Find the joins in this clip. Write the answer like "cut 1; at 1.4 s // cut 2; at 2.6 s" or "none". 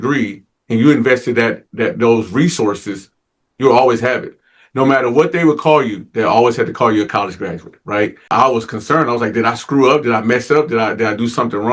cut 1; at 8.3 s